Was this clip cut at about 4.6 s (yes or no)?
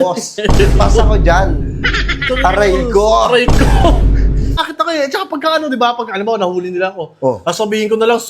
yes